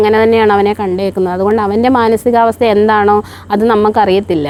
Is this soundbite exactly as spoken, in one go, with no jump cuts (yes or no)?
yes